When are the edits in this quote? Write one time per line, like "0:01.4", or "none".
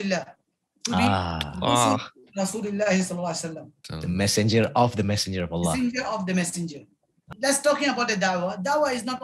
0:07.2